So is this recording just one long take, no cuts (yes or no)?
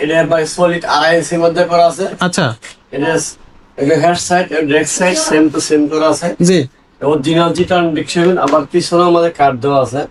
yes